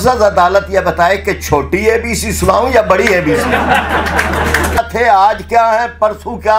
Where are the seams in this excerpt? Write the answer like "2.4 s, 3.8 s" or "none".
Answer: 4.8 s